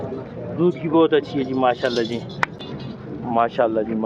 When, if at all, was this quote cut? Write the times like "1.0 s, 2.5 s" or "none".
2.6 s